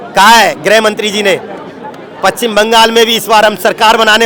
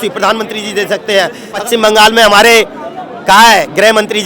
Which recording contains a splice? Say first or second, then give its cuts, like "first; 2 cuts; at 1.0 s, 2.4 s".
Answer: second; 1 cut; at 1.6 s